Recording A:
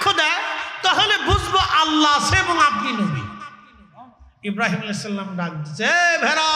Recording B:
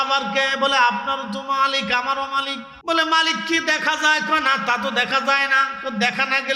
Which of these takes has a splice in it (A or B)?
B